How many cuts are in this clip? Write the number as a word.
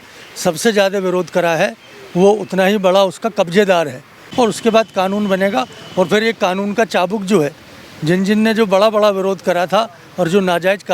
one